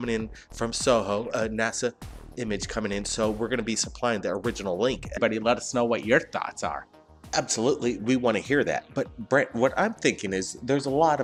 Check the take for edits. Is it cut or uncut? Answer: uncut